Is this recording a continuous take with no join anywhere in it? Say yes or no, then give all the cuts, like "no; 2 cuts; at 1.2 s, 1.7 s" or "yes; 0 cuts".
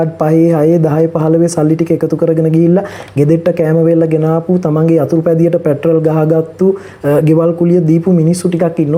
yes; 0 cuts